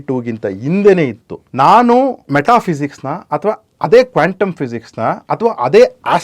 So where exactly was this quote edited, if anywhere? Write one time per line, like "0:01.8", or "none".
0:01.4
0:02.2